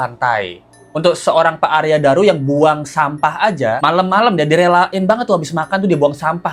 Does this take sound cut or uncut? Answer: cut